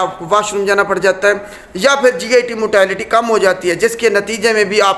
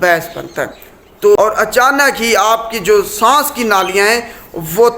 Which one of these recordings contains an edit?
second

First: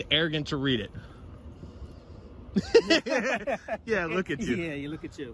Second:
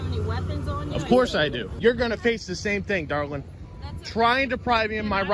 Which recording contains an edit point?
second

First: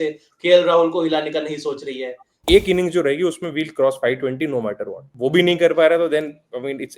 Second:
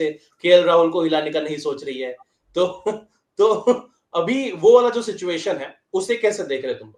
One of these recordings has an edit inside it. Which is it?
first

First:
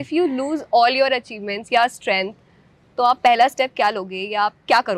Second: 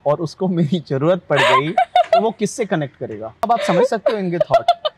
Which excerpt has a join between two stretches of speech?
second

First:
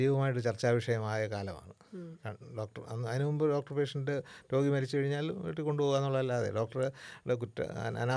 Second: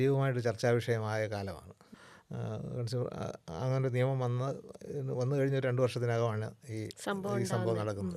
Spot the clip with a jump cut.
second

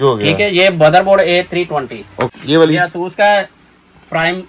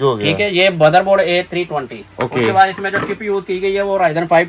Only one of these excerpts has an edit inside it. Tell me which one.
first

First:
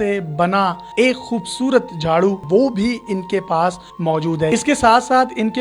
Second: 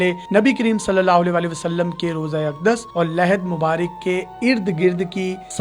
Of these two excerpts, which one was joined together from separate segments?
first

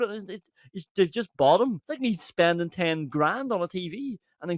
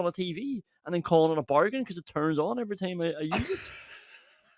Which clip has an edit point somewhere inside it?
first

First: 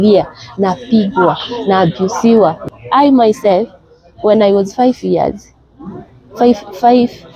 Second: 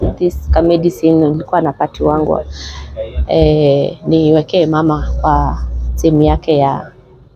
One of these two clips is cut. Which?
first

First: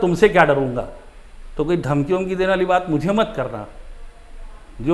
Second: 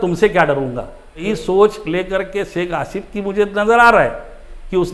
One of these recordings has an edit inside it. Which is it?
second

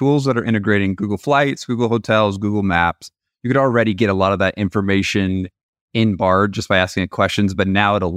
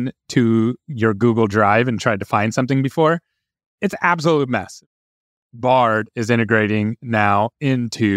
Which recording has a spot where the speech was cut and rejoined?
second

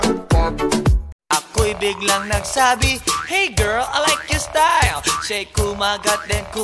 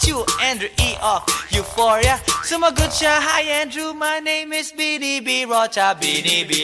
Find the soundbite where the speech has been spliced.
first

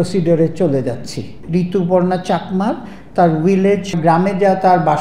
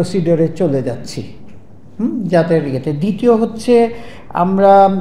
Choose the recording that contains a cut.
first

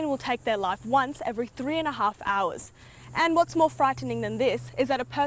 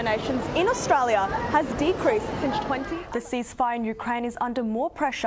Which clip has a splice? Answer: second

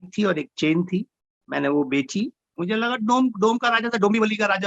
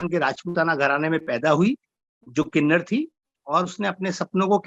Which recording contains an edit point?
first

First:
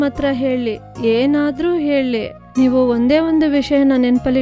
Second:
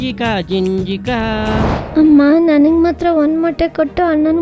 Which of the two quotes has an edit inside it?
second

